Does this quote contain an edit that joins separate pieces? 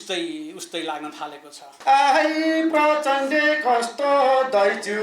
yes; 1 cut; at 1.7 s

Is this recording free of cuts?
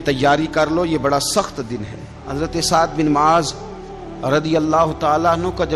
no; 1 cut; at 2.2 s

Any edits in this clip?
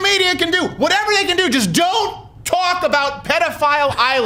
no; 0 cuts

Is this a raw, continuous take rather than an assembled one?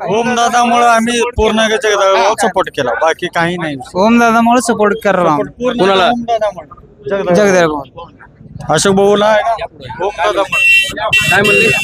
yes; 0 cuts

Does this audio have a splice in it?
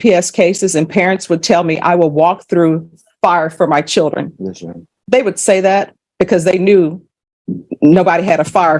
no; 0 cuts

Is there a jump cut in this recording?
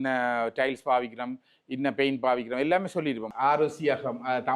yes; 1 cut; at 3.2 s

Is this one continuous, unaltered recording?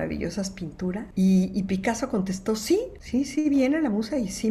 no; 2 cuts; at 1.1 s, 3.0 s

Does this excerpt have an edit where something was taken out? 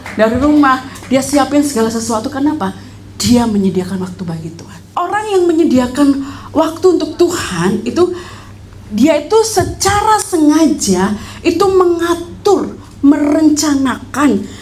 yes; 1 cut; at 4.9 s

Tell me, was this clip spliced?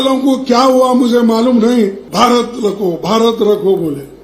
yes; 1 cut; at 2.0 s

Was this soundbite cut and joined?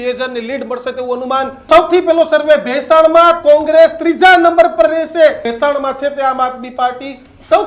yes; 2 cuts; at 1.7 s, 5.5 s

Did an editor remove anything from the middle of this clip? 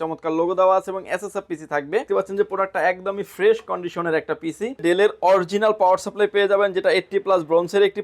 yes; 2 cuts; at 2.1 s, 4.8 s

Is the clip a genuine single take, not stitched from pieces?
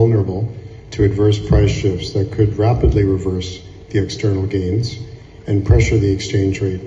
yes; 0 cuts

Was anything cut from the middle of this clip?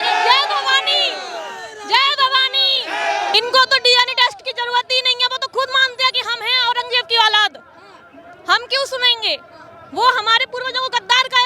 yes; 1 cut; at 3.3 s

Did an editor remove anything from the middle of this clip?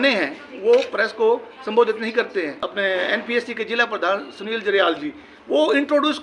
yes; 1 cut; at 2.7 s

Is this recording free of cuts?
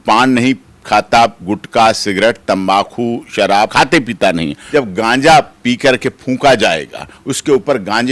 no; 2 cuts; at 3.7 s, 4.6 s

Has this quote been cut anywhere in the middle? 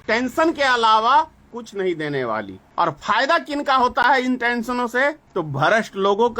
yes; 3 cuts; at 1.6 s, 2.6 s, 5.2 s

